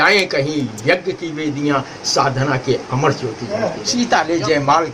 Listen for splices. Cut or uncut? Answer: cut